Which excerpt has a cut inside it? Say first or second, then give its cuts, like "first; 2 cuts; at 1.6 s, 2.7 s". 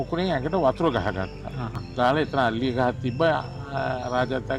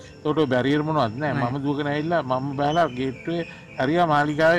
first; 1 cut; at 1.8 s